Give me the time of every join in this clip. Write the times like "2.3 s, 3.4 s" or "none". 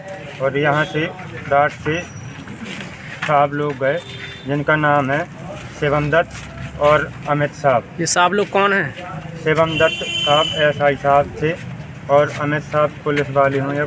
none